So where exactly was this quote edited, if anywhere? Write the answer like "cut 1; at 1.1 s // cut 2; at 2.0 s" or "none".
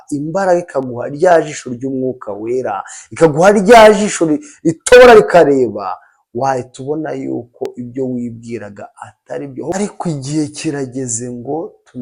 cut 1; at 9.7 s